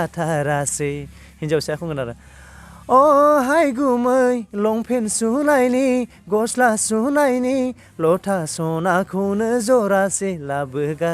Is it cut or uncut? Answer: uncut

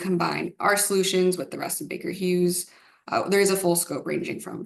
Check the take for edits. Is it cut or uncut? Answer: uncut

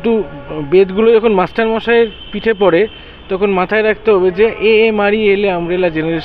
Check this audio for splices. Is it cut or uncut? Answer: uncut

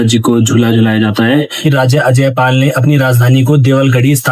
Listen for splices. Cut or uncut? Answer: cut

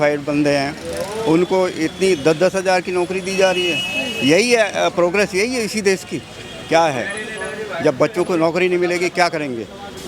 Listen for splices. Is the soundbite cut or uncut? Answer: uncut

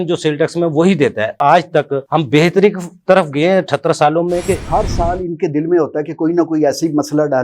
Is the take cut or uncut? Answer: cut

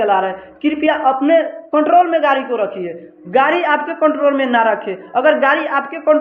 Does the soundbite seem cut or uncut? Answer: uncut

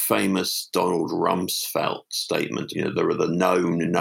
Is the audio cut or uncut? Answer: cut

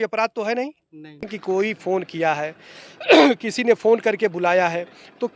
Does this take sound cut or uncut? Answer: cut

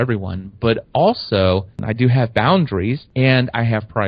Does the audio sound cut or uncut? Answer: cut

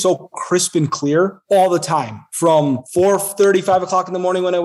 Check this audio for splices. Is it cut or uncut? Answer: cut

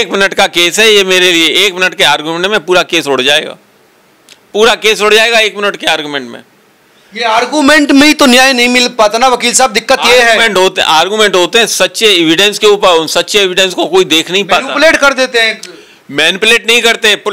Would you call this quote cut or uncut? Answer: uncut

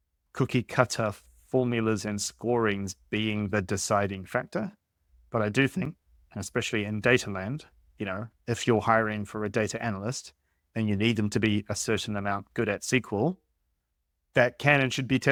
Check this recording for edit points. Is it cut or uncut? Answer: uncut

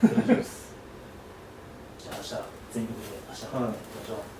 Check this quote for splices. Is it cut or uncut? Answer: cut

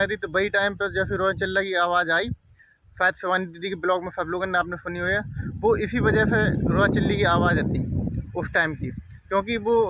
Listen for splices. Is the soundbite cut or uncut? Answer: uncut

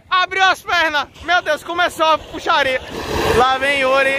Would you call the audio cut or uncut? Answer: cut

